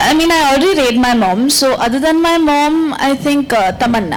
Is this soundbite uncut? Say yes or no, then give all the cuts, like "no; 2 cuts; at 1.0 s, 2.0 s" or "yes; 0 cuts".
yes; 0 cuts